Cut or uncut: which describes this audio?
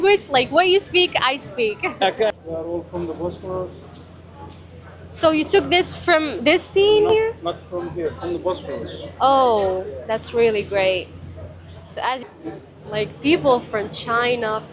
cut